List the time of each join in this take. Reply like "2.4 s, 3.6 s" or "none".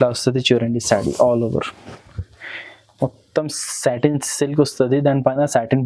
none